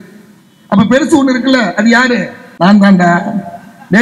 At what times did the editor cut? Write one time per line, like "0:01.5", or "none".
0:02.4